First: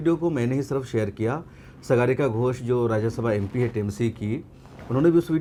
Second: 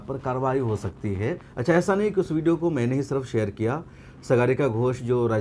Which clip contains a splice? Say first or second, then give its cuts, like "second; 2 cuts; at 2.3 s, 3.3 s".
second; 1 cut; at 1.5 s